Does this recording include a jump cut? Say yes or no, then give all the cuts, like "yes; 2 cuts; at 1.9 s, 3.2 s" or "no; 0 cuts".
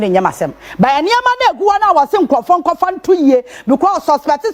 no; 0 cuts